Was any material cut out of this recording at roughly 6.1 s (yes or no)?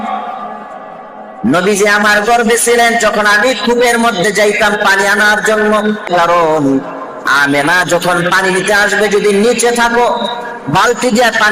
yes